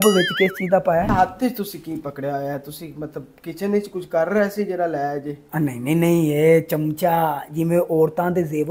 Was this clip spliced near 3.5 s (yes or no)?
no